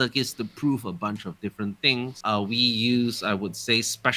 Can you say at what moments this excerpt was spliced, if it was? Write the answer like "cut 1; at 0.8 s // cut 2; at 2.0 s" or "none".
cut 1; at 2.2 s